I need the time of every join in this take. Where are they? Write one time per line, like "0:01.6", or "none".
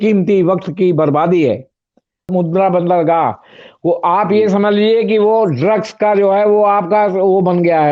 0:02.3